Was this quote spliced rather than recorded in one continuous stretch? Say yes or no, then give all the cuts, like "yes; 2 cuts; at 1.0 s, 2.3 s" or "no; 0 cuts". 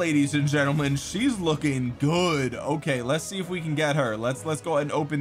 no; 0 cuts